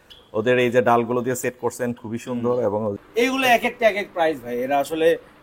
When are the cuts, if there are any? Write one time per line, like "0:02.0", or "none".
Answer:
0:03.0